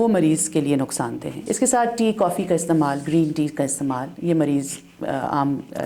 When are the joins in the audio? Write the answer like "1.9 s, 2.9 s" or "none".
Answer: 1.3 s

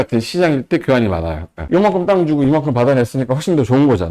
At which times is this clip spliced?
1.5 s

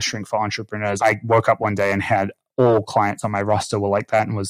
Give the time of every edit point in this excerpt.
1.0 s

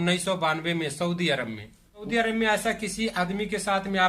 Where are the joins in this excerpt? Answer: 2.0 s

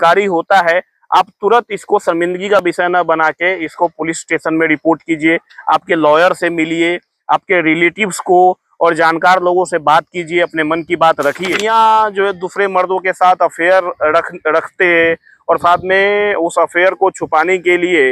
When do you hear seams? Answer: 11.6 s

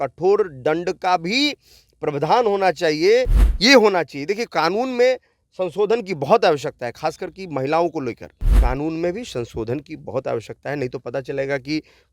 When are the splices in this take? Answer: 3.4 s, 8.5 s

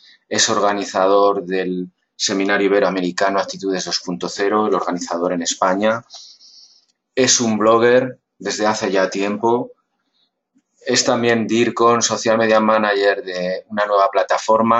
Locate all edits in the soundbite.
13.7 s

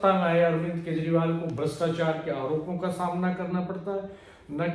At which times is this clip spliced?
none

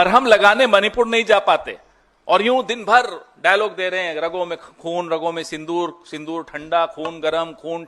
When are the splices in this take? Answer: none

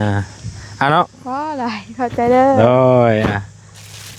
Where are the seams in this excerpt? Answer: none

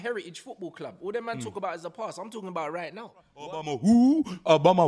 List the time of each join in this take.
3.4 s

